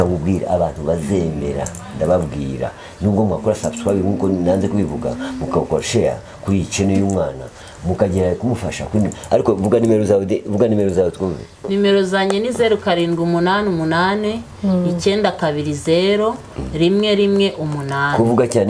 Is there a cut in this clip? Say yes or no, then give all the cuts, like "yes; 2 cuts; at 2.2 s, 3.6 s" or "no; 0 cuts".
no; 0 cuts